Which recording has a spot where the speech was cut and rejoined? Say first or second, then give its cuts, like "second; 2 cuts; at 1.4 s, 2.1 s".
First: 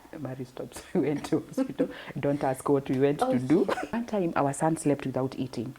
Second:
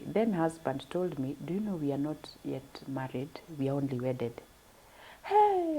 first; 1 cut; at 3.9 s